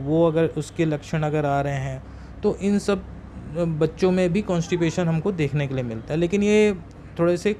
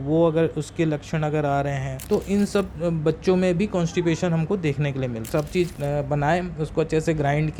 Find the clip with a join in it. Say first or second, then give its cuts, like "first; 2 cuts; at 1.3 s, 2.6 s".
second; 3 cuts; at 1.9 s, 2.7 s, 5.3 s